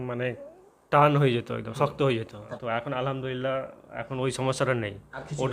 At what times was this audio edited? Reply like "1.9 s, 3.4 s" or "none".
2.5 s